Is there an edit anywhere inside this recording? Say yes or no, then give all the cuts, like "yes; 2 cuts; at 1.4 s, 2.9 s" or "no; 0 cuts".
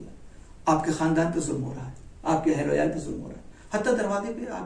no; 0 cuts